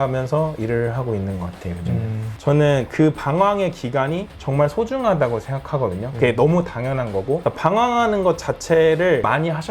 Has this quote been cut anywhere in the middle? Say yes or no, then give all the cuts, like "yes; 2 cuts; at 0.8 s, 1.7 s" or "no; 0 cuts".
yes; 1 cut; at 2.3 s